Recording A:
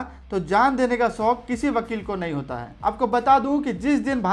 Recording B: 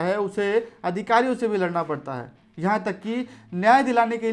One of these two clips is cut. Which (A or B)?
A